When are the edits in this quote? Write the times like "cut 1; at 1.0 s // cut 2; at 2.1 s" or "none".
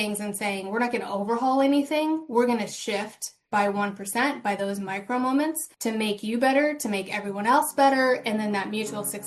cut 1; at 5.7 s